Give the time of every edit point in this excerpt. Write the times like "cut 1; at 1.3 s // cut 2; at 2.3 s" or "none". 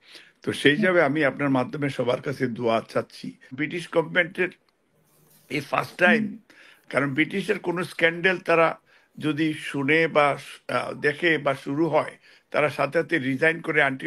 cut 1; at 3.6 s